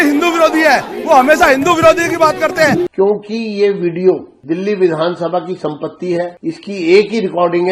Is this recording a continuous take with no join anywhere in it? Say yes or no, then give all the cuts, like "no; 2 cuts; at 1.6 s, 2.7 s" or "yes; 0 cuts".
no; 3 cuts; at 2.9 s, 4.3 s, 6.4 s